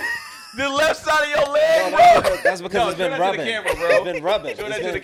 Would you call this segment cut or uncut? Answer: uncut